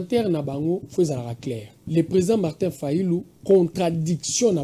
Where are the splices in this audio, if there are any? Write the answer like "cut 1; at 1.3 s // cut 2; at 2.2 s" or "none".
cut 1; at 1.7 s